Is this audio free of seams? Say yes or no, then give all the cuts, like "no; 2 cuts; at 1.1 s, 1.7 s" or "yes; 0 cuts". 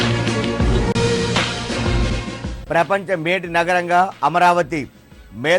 no; 1 cut; at 0.9 s